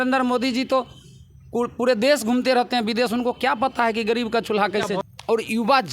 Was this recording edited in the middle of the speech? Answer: yes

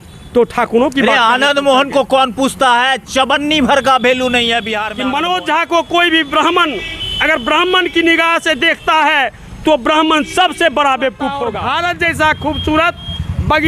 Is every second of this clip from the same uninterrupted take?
no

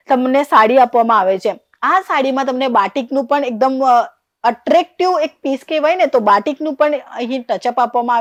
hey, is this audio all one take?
yes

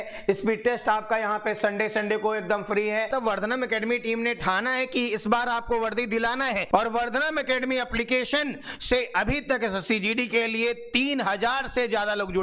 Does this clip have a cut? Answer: yes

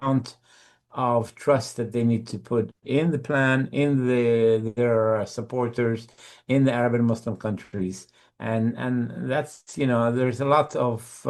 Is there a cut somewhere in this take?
no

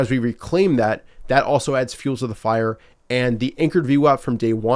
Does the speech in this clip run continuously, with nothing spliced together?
yes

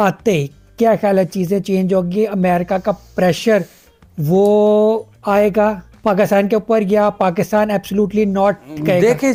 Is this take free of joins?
yes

